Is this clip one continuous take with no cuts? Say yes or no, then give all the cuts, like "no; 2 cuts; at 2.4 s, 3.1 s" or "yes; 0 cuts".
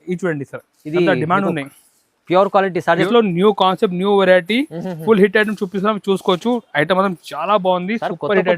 no; 1 cut; at 3.1 s